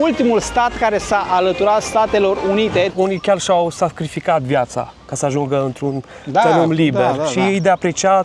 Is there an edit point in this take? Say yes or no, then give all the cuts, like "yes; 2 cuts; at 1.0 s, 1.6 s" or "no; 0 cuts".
yes; 1 cut; at 2.9 s